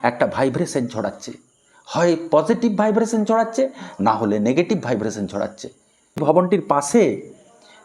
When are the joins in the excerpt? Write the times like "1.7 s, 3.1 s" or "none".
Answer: 6.2 s